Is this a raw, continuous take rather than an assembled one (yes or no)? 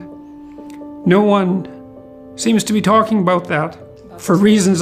yes